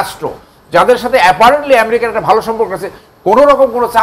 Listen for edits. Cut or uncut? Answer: uncut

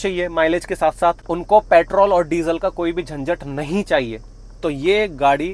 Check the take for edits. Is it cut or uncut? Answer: cut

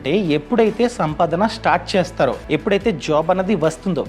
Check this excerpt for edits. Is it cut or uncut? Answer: cut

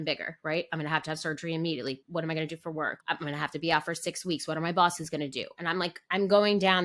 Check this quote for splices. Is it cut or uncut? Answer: cut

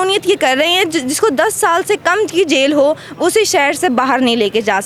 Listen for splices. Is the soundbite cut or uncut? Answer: uncut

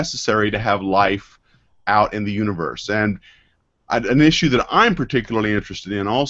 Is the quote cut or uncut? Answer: cut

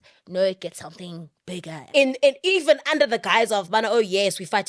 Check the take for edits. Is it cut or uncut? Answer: cut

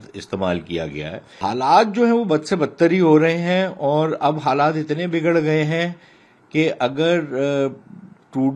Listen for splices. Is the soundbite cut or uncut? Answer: cut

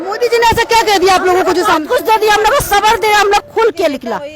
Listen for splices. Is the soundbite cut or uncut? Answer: cut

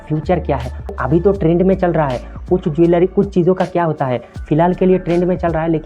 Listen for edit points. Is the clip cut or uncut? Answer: cut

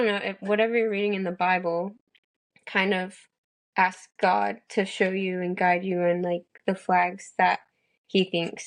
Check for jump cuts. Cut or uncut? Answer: uncut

